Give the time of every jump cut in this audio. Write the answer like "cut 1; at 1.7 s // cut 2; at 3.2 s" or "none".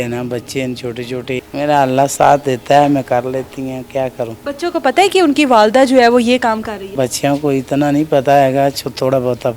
cut 1; at 1.4 s // cut 2; at 4.4 s // cut 3; at 6.9 s